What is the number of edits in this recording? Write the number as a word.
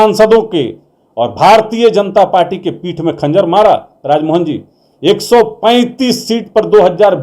zero